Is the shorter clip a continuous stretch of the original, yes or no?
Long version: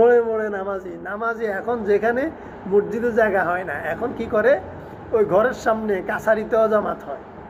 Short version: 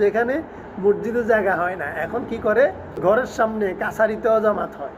no